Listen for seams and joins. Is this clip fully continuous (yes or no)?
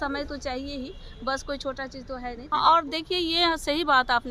no